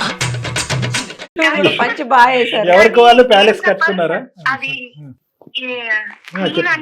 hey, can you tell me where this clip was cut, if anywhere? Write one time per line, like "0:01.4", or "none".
none